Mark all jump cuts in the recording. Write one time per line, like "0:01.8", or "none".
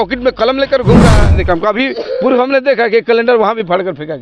0:01.3